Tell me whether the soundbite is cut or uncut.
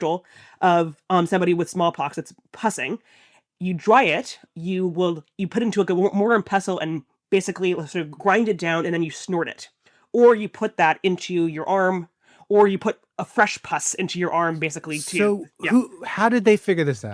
cut